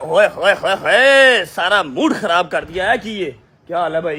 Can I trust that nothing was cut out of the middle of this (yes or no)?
yes